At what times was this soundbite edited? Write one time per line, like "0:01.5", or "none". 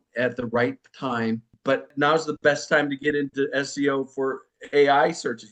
0:01.9
0:04.5